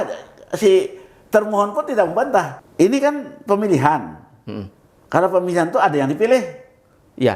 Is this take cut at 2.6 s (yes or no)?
yes